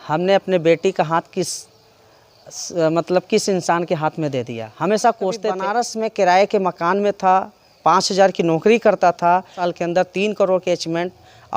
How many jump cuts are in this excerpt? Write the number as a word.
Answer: two